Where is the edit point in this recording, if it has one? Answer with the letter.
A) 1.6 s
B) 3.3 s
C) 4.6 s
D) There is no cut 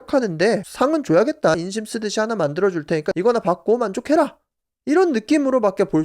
A